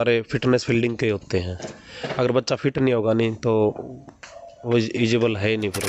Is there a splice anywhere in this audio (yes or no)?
no